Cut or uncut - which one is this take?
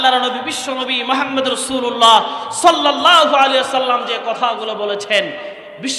uncut